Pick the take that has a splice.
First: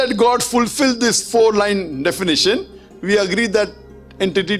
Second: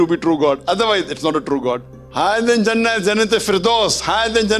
second; 1 cut; at 2.0 s

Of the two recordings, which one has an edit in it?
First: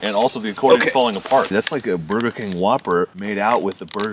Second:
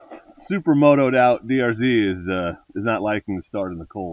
first; 2 cuts; at 1.5 s, 3.2 s

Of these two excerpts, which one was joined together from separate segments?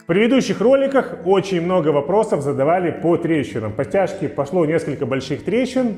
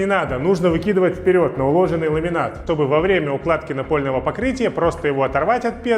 second; 1 cut; at 2.6 s

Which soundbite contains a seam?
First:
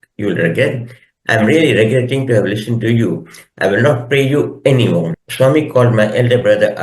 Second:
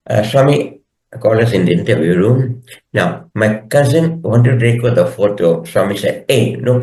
first; 1 cut; at 5.2 s

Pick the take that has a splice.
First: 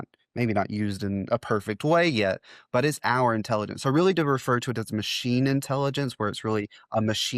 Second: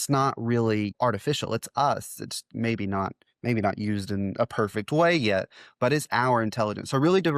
second; 1 cut; at 0.9 s

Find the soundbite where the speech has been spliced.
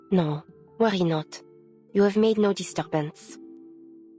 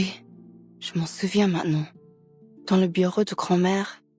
first; 1 cut; at 3.2 s

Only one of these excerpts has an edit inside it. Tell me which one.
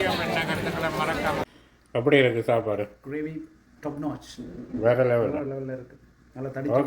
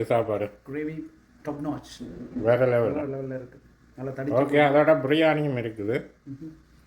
first; 1 cut; at 1.4 s

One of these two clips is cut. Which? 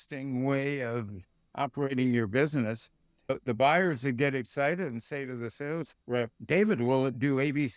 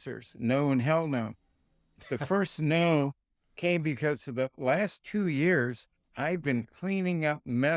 first; 1 cut; at 3.6 s

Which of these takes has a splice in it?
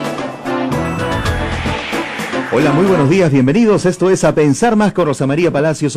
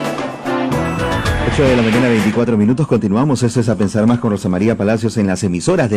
first; 1 cut; at 1.4 s

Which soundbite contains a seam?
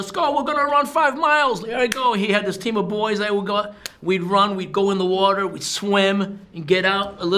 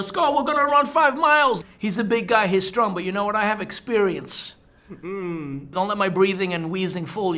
second; 2 cuts; at 1.7 s, 5.7 s

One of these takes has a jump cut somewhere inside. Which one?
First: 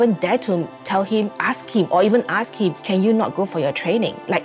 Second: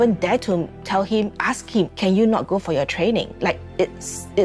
second; 1 cut; at 1.9 s

